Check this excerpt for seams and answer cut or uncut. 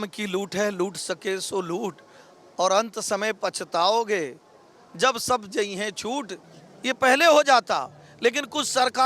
cut